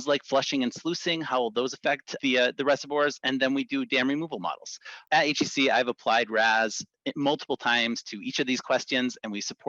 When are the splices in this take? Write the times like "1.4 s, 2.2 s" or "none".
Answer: 2.1 s, 5.0 s